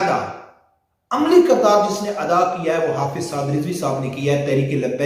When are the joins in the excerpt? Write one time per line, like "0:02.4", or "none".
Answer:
none